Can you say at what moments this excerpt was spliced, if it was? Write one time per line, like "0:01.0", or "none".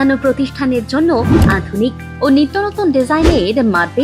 none